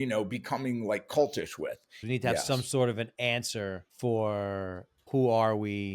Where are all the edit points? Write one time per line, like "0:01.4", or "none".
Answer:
0:02.0
0:03.9
0:05.1